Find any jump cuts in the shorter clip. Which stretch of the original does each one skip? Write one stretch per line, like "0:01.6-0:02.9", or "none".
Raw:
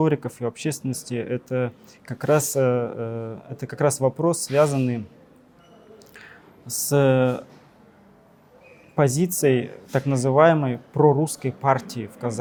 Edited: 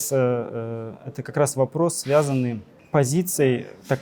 0:05.1-0:08.7

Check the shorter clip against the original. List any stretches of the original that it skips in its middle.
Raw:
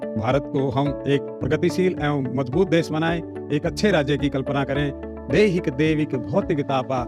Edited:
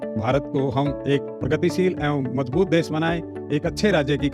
none

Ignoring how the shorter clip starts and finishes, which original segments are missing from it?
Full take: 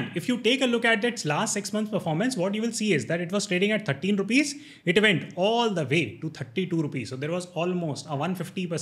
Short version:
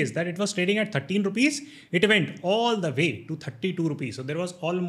none

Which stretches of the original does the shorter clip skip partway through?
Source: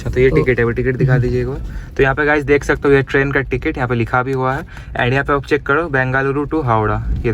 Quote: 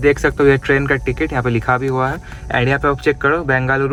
none

